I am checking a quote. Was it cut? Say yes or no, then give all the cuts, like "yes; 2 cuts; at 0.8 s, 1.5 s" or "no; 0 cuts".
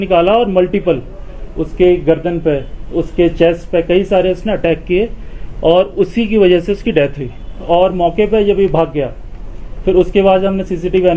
no; 0 cuts